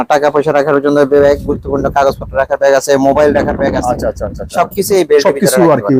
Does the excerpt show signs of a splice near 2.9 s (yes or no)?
no